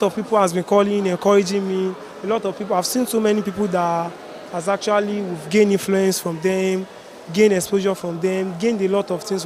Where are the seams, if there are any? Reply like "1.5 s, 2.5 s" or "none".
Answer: none